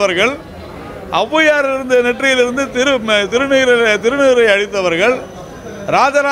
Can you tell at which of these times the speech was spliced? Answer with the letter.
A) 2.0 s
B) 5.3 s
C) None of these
C